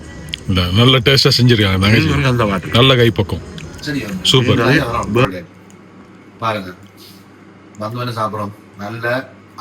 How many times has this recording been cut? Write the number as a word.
one